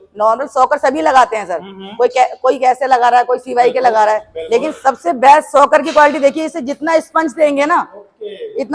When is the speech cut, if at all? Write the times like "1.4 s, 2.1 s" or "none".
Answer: none